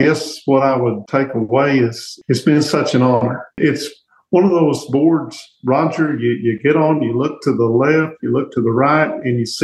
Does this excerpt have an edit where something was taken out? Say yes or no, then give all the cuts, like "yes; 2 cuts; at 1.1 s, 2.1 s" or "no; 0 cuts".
yes; 3 cuts; at 1.0 s, 2.1 s, 3.6 s